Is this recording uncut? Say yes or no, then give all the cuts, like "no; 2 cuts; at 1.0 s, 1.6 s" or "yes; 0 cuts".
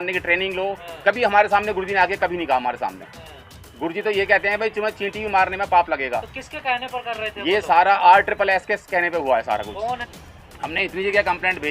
no; 1 cut; at 10.1 s